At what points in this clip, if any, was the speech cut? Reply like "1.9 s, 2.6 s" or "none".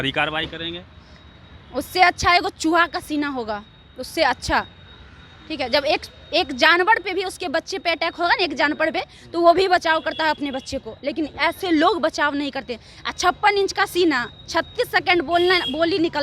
none